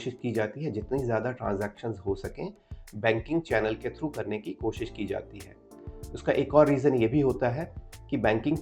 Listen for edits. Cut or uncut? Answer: uncut